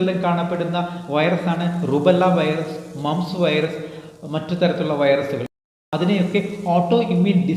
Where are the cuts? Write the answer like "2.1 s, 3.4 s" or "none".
5.7 s